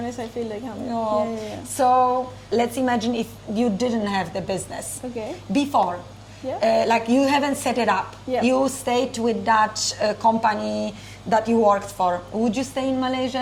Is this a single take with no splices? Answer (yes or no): yes